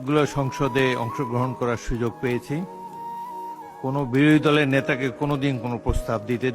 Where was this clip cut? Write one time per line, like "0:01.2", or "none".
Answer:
none